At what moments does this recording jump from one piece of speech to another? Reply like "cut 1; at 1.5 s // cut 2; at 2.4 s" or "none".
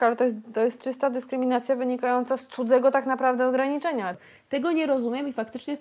cut 1; at 4.1 s